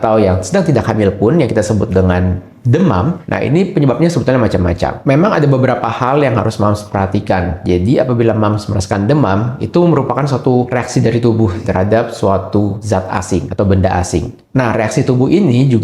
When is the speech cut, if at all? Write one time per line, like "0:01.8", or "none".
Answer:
0:05.0
0:10.7
0:11.6
0:13.1

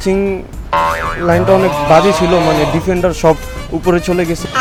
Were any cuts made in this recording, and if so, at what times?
none

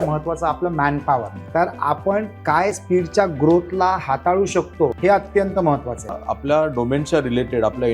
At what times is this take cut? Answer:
0:01.4
0:02.8
0:04.9
0:06.3

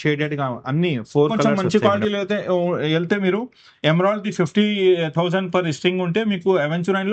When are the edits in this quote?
0:01.4

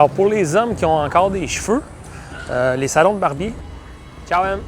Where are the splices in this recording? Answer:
0:03.6

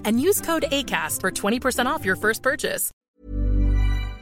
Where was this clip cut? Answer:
0:02.9

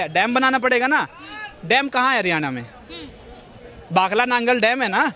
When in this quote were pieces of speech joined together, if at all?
none

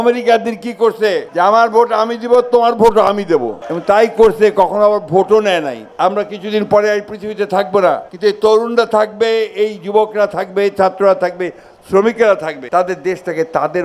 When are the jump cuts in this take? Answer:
0:01.3
0:05.8
0:08.1
0:12.5

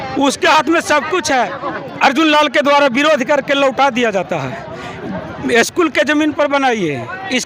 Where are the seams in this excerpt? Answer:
0:01.6

